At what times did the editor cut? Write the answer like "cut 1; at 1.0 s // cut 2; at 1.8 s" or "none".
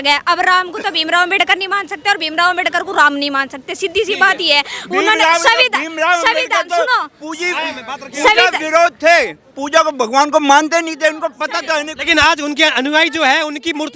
none